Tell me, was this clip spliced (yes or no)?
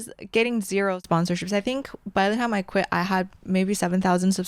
no